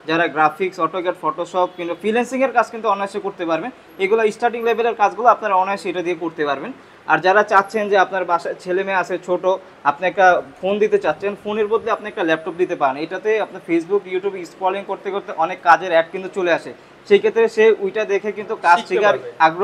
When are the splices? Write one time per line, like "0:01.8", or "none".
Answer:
none